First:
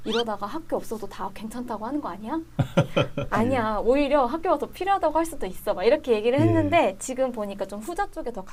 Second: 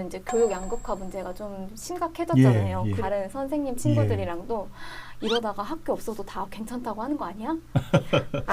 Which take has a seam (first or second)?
second